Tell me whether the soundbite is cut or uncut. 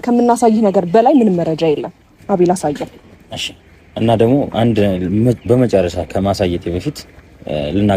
cut